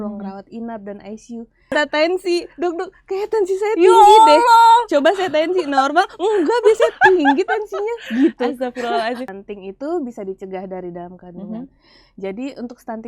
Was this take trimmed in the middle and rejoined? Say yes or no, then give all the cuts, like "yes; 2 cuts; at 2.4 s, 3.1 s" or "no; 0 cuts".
yes; 2 cuts; at 1.7 s, 9.4 s